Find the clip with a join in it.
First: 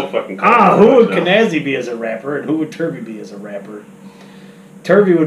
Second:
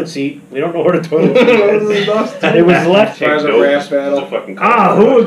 second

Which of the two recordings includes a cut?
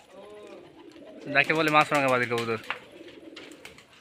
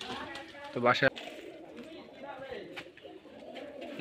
second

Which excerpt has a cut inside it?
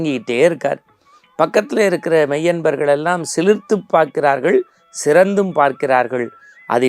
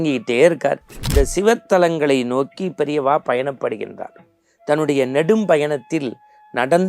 second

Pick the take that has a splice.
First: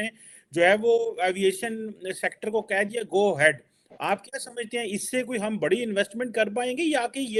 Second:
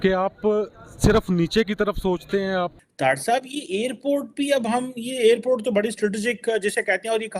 second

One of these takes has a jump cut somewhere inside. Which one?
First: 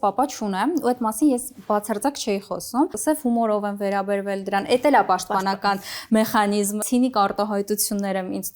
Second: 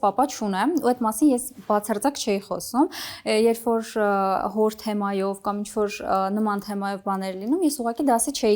first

